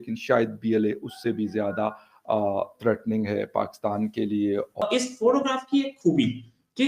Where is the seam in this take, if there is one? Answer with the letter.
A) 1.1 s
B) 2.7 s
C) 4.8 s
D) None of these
C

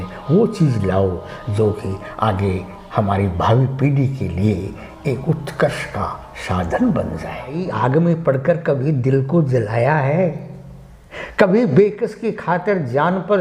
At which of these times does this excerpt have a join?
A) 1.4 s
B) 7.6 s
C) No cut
B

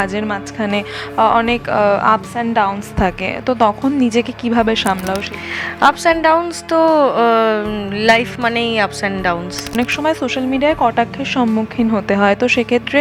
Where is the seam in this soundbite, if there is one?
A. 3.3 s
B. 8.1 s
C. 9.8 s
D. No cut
C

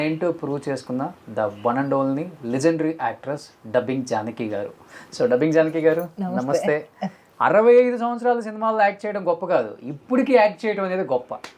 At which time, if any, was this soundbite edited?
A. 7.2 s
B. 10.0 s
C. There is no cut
A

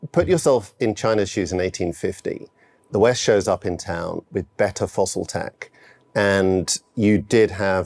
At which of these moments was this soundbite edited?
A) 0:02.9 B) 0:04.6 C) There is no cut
A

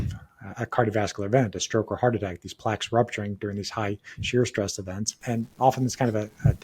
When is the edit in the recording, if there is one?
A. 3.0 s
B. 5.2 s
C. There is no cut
B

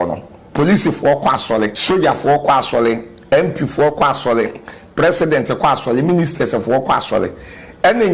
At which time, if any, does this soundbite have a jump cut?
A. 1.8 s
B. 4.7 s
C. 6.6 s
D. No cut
A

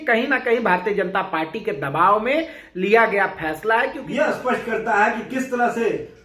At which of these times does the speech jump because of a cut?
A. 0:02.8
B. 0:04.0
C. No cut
B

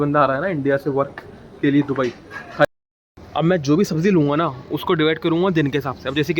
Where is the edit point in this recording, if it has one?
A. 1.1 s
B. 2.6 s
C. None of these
B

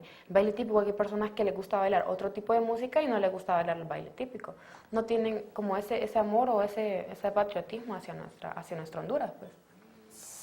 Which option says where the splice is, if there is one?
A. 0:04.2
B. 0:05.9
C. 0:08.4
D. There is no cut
C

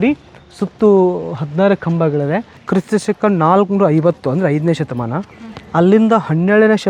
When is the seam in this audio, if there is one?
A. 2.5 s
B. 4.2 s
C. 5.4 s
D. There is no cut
A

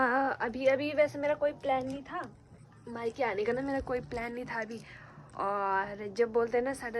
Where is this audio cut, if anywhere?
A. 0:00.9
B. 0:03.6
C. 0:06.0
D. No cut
D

